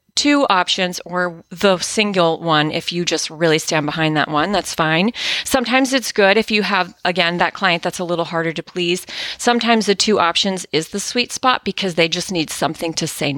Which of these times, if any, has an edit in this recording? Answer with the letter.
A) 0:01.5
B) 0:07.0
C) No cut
C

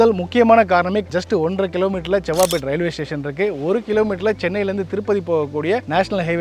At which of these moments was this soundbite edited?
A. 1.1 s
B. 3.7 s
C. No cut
A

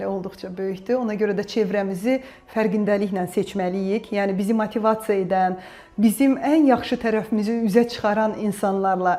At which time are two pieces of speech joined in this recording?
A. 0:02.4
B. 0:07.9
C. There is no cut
C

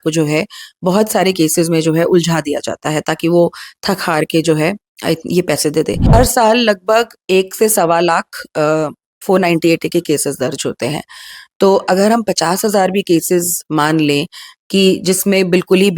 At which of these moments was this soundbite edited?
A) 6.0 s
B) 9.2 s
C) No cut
A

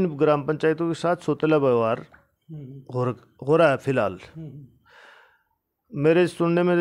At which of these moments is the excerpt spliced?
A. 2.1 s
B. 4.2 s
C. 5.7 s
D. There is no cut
D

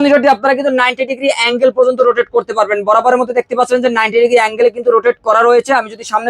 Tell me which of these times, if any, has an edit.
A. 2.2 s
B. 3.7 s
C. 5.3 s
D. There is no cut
D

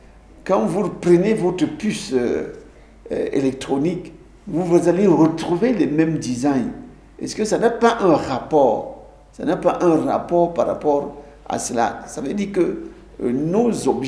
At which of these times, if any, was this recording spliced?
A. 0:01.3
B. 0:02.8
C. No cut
C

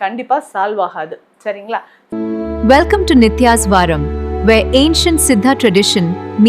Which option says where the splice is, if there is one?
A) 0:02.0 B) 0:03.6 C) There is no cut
A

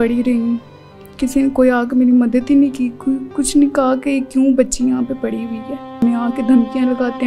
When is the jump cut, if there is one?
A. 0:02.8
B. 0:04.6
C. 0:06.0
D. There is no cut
C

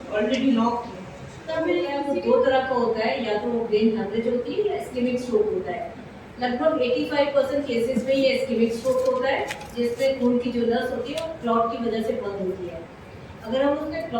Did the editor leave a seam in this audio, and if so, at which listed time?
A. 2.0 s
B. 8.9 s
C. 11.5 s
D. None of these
A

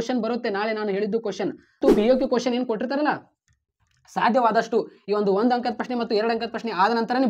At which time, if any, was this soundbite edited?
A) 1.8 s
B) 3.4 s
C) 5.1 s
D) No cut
A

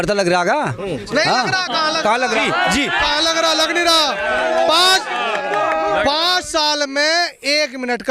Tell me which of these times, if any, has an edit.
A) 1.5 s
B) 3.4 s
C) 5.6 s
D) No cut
D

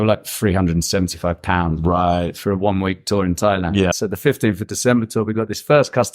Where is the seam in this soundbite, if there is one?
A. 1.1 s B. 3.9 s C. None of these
B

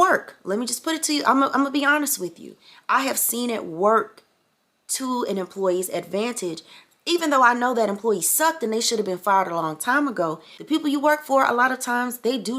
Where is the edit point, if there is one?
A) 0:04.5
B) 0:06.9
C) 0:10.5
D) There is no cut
C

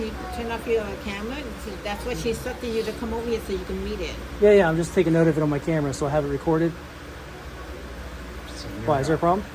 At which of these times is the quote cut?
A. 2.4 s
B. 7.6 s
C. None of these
C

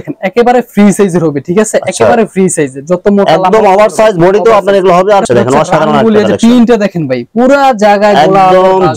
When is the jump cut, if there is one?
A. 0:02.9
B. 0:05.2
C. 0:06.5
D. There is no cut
B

